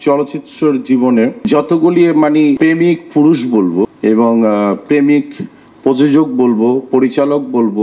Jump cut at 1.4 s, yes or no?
yes